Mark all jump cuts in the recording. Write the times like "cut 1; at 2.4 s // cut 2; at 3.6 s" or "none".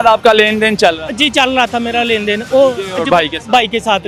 none

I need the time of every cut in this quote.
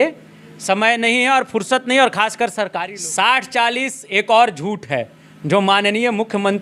cut 1; at 2.8 s

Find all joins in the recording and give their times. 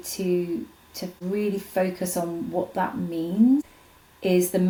none

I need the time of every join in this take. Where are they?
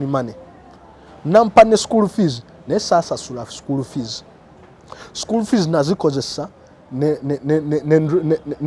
none

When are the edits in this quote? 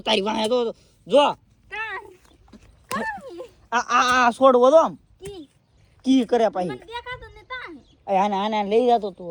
none

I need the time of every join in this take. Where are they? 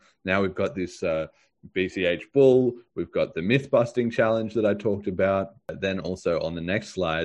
cut 1; at 5.7 s

